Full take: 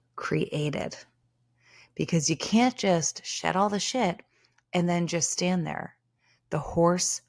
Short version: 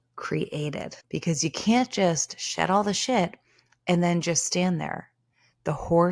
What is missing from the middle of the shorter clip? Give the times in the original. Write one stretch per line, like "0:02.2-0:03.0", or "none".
0:00.9-0:01.8

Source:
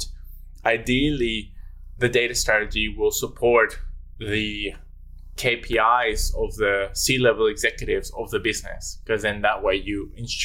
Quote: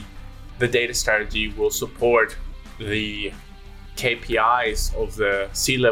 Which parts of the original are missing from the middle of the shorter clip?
none

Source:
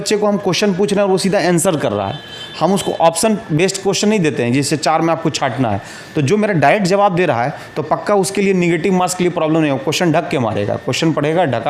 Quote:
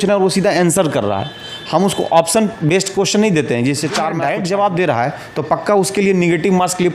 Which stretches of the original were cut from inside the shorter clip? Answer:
0:05.0-0:06.5

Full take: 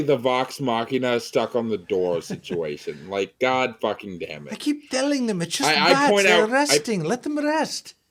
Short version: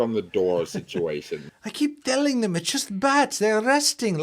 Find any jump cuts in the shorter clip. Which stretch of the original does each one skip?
0:03.0-0:04.3

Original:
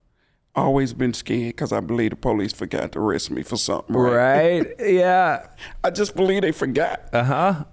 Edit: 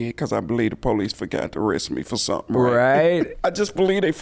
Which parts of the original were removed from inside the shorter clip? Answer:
0:04.7-0:05.7

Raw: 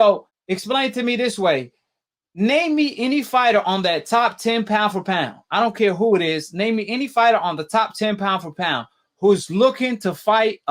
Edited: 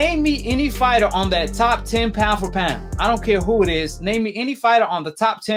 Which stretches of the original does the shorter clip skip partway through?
none

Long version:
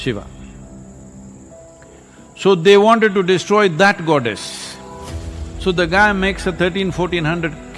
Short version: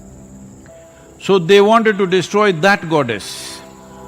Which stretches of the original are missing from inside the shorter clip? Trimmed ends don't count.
0:02.0-0:02.4

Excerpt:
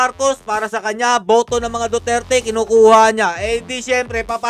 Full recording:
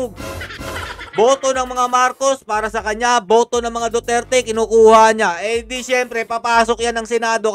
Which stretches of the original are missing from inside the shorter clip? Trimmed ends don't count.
none

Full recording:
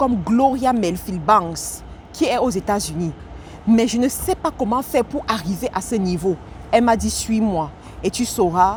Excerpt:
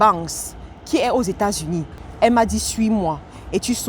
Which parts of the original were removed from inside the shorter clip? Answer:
0:03.3-0:06.5

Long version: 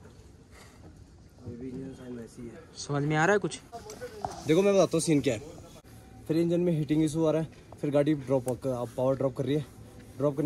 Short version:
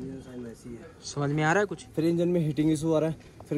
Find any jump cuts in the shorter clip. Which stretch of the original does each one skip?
0:03.5-0:06.1

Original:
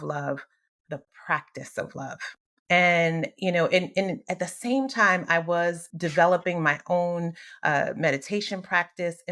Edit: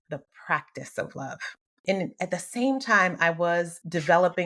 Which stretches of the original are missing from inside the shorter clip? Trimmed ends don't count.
0:02.6-0:03.9

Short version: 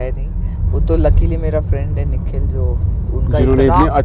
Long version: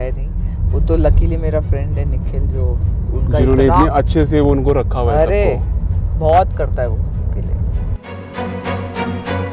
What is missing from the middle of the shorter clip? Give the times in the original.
none

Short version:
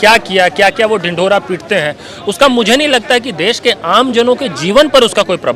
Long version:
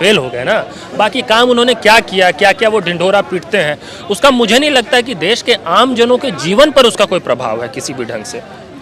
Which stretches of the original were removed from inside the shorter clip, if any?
none

